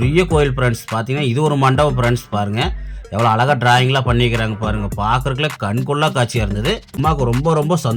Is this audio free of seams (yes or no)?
no